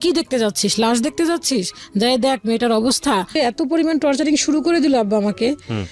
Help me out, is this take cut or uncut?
cut